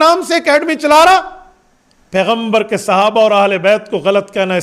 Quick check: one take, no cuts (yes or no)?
yes